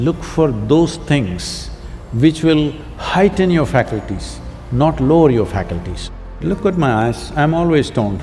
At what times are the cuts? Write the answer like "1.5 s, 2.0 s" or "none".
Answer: 6.4 s